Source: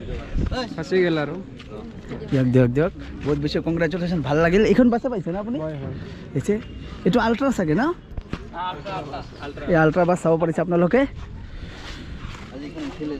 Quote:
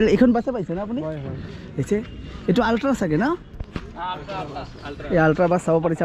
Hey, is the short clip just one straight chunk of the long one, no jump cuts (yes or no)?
yes